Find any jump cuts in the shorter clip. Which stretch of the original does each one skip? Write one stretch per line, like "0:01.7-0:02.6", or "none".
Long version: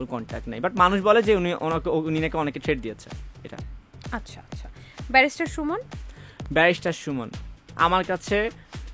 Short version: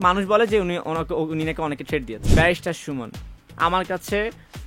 0:03.0-0:06.4